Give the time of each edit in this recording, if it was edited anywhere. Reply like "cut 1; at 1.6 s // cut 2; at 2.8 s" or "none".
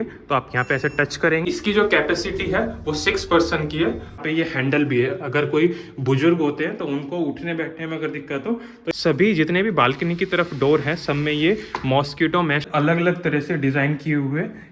cut 1; at 1.4 s // cut 2; at 4.2 s // cut 3; at 8.9 s // cut 4; at 12.7 s